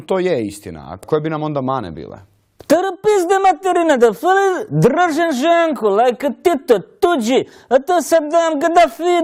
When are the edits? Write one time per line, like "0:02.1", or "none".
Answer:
none